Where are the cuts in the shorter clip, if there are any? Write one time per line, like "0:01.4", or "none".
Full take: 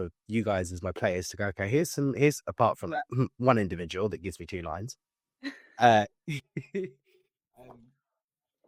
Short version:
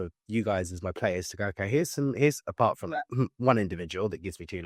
none